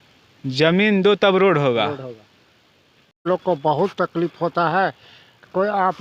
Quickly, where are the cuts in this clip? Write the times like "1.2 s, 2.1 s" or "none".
3.3 s